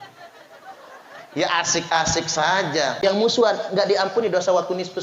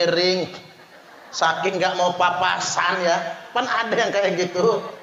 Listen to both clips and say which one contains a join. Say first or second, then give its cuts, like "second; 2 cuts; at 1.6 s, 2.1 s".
first; 1 cut; at 3.0 s